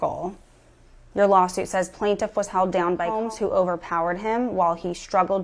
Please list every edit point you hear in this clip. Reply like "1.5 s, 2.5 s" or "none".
3.2 s

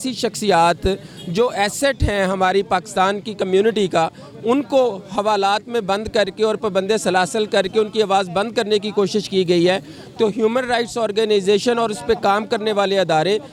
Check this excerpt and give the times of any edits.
none

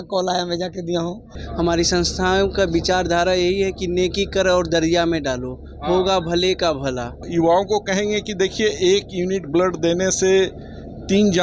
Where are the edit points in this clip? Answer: 1.4 s, 7.2 s

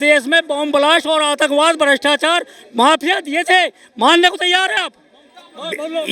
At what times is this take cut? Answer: none

